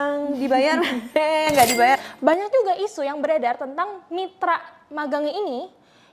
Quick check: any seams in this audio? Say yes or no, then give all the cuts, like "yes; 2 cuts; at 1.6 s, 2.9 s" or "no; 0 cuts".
yes; 1 cut; at 2.0 s